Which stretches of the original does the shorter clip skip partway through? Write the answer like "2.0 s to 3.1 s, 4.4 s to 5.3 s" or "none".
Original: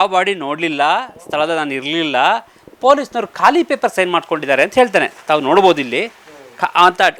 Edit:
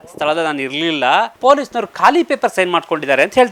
2.5 s to 2.7 s